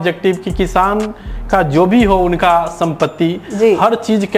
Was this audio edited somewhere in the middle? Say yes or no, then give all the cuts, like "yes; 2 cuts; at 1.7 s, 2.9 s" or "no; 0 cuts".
no; 0 cuts